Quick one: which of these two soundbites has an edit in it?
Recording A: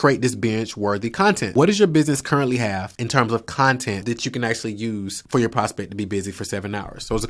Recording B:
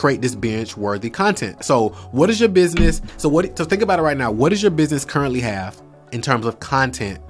A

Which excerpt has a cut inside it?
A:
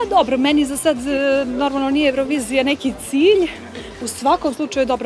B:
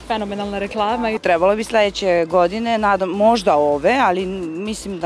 B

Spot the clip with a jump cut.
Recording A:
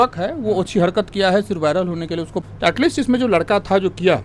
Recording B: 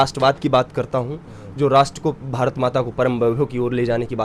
A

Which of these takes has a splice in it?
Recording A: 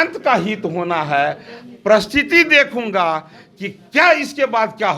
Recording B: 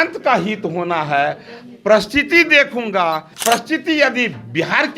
B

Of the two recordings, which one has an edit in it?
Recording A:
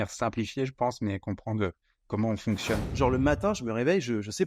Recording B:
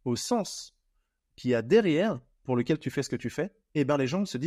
A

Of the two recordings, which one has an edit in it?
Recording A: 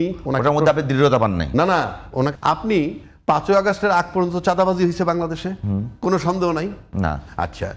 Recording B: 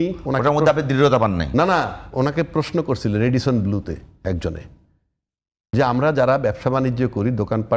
A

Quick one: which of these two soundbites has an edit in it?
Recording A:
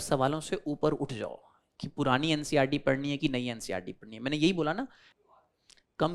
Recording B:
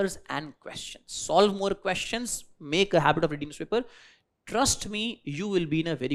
A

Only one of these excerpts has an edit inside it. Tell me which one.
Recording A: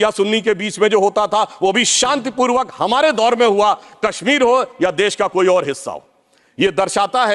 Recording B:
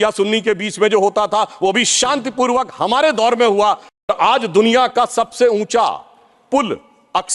B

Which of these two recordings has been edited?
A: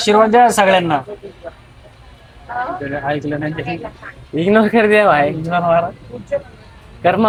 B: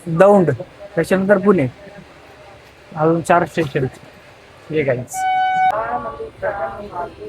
B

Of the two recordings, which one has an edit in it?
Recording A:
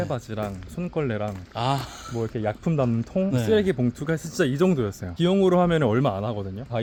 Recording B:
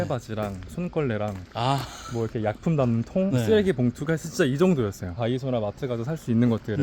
B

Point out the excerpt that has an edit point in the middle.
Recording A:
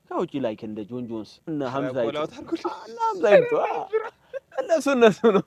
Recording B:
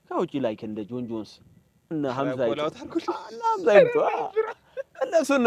A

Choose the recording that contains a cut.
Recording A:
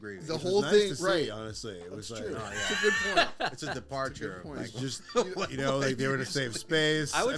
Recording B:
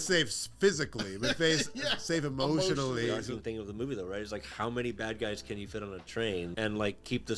B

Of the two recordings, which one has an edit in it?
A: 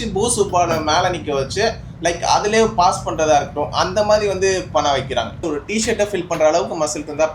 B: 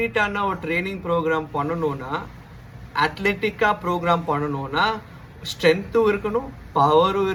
A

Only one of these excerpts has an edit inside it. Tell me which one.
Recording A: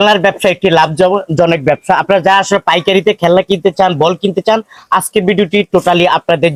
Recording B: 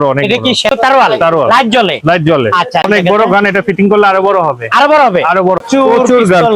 B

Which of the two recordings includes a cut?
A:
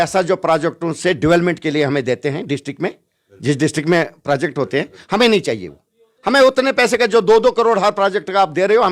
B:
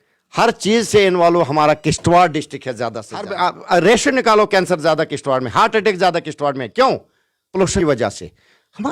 B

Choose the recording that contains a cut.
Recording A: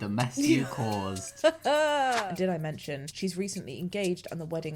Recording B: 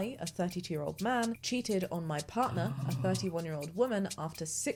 A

